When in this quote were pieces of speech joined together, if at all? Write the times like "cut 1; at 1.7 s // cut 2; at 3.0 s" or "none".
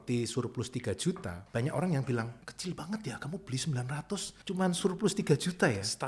cut 1; at 1.3 s // cut 2; at 2.4 s // cut 3; at 4.3 s